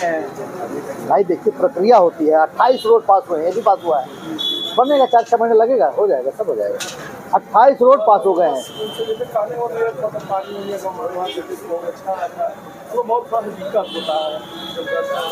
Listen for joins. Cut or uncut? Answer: uncut